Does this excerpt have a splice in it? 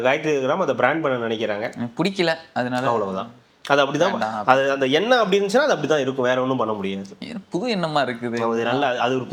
no; 0 cuts

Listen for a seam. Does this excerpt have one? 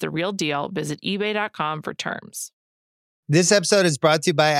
yes; 1 cut; at 2.7 s

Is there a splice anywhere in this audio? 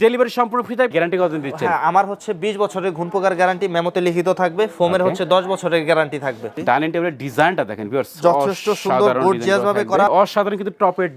yes; 3 cuts; at 0.9 s, 6.5 s, 10.1 s

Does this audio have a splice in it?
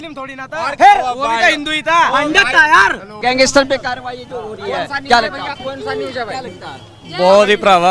no; 0 cuts

